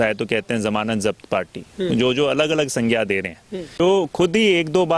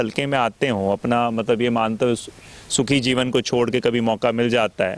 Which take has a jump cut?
first; 1 cut; at 3.8 s

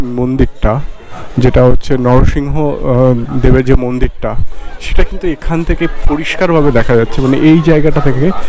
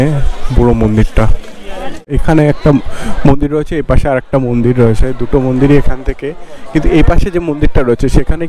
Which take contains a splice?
second; 1 cut; at 2.2 s

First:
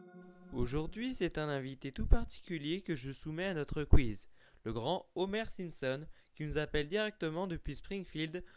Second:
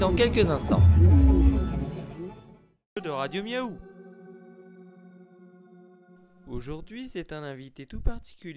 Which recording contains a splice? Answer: second; 1 cut; at 3.0 s

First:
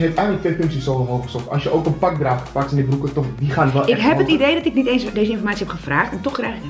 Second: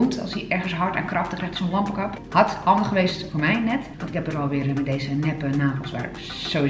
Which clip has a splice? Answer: second; 1 cut; at 4.0 s

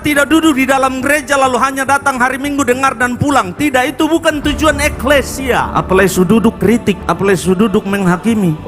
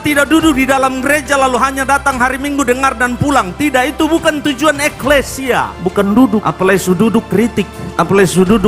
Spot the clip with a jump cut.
first; 2 cuts; at 5.8 s, 7.1 s

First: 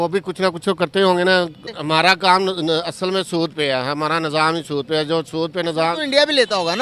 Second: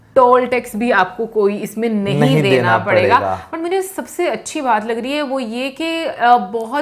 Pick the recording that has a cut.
first; 1 cut; at 1.7 s

